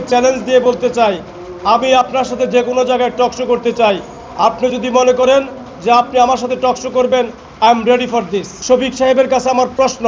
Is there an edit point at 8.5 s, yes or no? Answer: yes